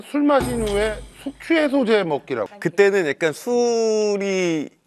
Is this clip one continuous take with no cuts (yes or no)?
no